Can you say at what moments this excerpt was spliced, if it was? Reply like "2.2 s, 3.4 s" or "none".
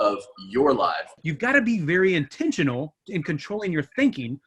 1.2 s

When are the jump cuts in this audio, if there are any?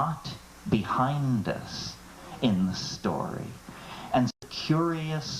4.5 s

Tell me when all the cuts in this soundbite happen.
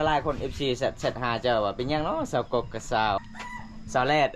3.2 s

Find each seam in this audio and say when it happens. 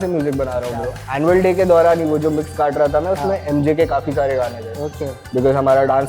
1.0 s

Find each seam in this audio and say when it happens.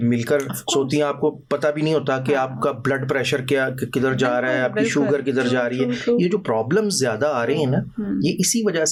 none

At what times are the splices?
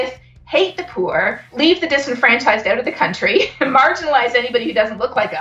1.5 s

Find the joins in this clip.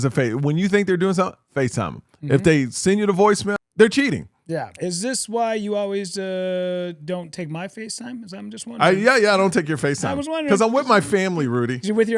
3.5 s, 4.7 s

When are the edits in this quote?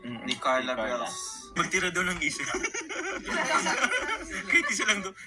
1.5 s

